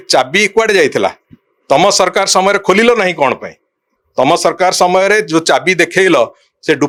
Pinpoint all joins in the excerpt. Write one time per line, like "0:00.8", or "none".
none